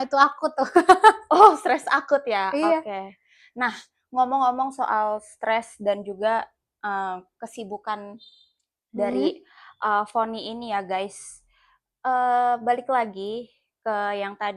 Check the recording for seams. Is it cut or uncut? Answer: uncut